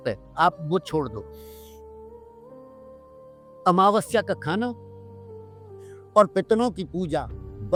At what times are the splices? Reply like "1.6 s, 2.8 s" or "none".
none